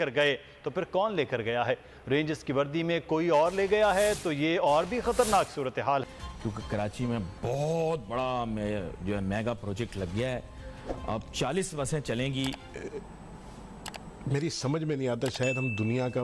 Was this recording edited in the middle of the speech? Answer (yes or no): yes